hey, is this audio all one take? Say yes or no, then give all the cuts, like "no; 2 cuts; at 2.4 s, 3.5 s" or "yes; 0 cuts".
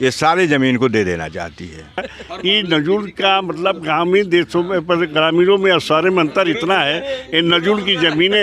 no; 1 cut; at 2.1 s